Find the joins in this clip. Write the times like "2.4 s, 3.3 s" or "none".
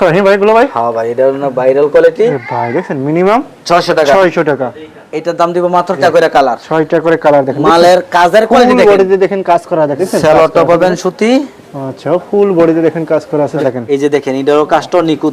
2.4 s, 6.0 s, 10.0 s, 13.6 s